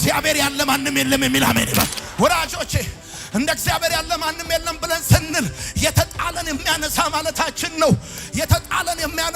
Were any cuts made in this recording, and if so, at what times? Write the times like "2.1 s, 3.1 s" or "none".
2.0 s